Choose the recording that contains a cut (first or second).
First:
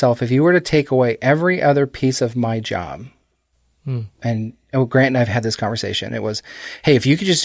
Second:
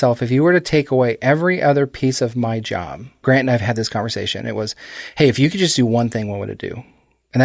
second